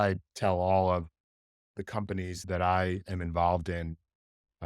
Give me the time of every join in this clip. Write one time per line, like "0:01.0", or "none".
0:02.4